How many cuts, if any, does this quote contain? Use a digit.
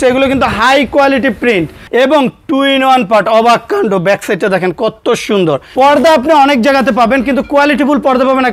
2